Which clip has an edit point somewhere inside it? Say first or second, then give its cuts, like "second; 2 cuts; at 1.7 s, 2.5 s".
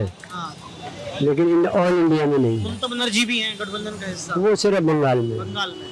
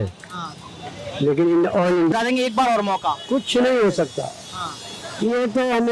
second; 1 cut; at 2.1 s